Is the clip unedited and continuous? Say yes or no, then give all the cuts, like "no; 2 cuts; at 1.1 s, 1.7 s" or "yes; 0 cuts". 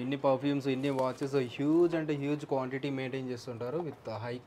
yes; 0 cuts